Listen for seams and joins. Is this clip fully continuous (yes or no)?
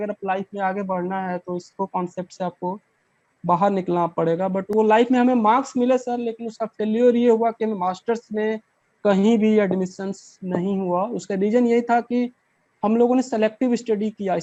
yes